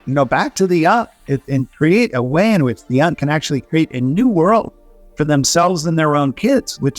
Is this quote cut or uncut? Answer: uncut